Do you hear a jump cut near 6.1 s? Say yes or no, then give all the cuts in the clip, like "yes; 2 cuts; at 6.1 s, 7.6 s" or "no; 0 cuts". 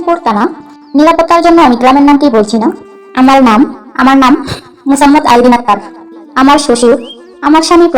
yes; 1 cut; at 6.1 s